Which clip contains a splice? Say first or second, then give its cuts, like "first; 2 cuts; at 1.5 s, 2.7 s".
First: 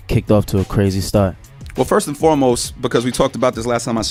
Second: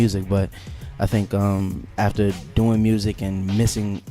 second; 1 cut; at 1.5 s